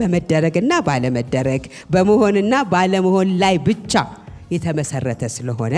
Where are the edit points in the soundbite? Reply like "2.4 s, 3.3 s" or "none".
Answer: none